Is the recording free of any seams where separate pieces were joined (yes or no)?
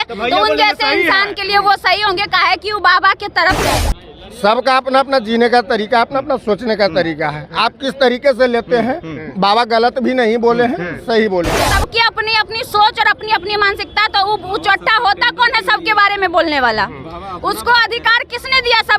no